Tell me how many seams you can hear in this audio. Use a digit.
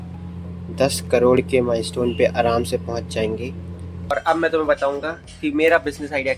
1